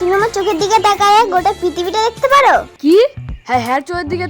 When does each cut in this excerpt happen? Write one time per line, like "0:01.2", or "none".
0:02.7